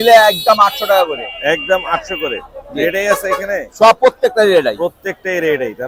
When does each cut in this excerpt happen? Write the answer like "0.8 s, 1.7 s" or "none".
none